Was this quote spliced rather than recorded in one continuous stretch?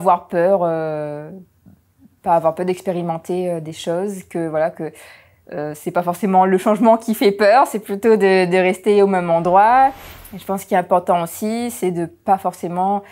yes; 1 cut; at 10.1 s

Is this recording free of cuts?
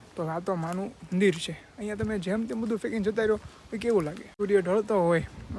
no; 1 cut; at 4.3 s

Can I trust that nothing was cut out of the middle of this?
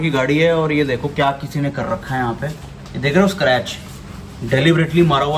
yes; 0 cuts

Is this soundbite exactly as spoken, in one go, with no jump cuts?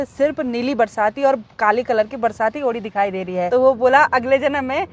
no; 1 cut; at 3.5 s

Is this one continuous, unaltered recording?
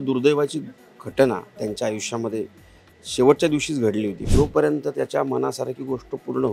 no; 1 cut; at 4.2 s

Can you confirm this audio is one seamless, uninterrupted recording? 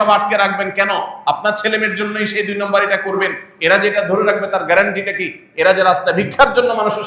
yes; 0 cuts

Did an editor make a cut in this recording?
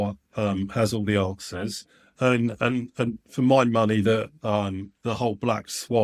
no; 0 cuts

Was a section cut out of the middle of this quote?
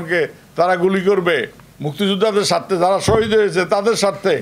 no; 0 cuts

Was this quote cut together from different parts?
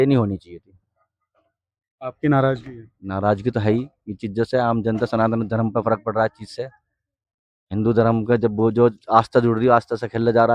no; 0 cuts

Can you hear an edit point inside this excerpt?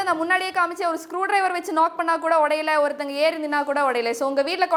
no; 0 cuts

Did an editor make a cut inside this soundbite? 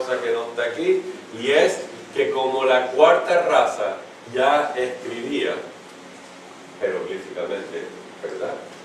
yes; 1 cut; at 1.6 s

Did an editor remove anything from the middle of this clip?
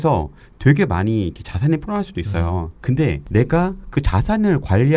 yes; 1 cut; at 3.2 s

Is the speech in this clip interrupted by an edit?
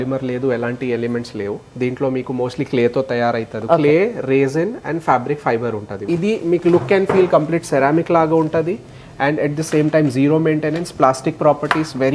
yes; 2 cuts; at 3.6 s, 6.0 s

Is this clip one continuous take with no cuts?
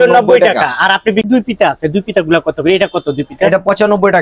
no; 1 cut; at 1.3 s

